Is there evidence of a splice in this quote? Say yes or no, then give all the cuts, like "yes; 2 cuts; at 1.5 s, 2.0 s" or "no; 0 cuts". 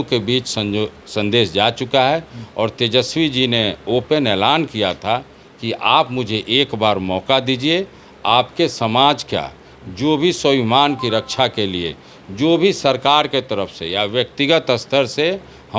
no; 0 cuts